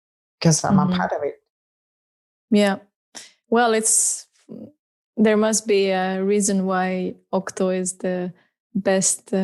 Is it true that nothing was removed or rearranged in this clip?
yes; 0 cuts

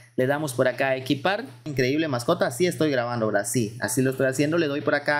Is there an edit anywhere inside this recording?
yes; 1 cut; at 1.7 s

